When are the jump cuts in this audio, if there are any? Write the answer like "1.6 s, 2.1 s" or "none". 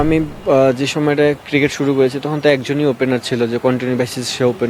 none